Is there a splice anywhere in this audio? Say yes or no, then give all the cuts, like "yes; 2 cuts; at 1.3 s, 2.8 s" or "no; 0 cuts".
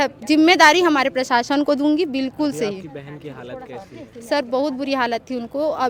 no; 0 cuts